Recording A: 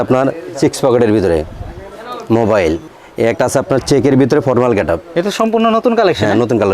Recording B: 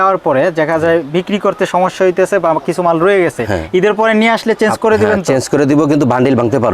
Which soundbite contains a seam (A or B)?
A